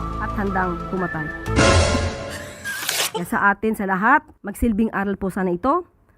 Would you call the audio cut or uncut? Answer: cut